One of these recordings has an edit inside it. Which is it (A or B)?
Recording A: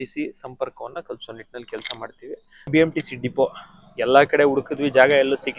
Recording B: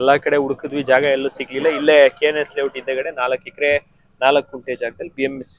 A